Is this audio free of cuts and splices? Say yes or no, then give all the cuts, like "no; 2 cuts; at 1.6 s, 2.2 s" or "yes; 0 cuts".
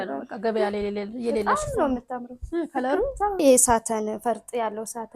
no; 1 cut; at 3.4 s